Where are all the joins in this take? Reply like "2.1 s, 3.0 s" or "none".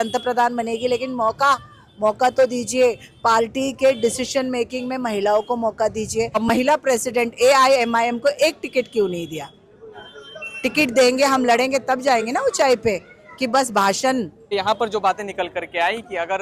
6.4 s, 14.5 s

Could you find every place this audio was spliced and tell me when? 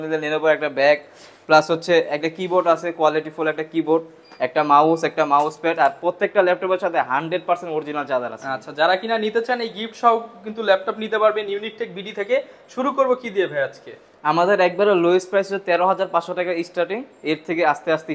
none

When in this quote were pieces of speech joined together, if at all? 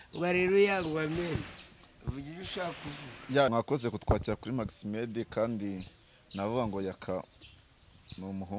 3.5 s

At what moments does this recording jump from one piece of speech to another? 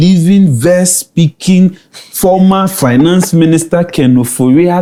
none

